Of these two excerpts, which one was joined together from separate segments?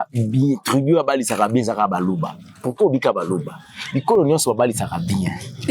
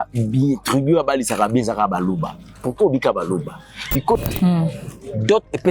second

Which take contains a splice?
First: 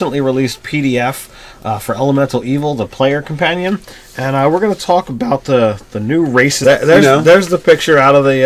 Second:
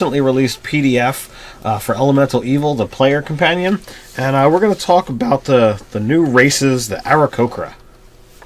second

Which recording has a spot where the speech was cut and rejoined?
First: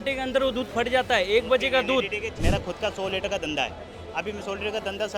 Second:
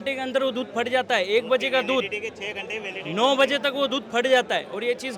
first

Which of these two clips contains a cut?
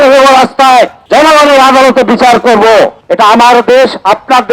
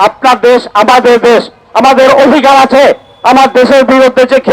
first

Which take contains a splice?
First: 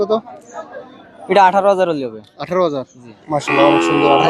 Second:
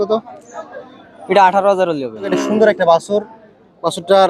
second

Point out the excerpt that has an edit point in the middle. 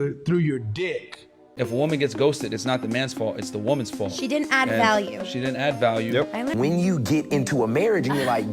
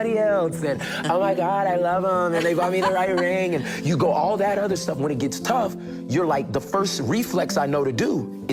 first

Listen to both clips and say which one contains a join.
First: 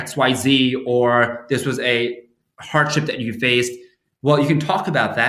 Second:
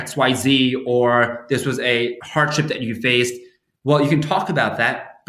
second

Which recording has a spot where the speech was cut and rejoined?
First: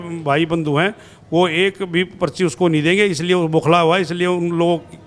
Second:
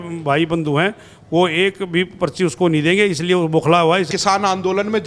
second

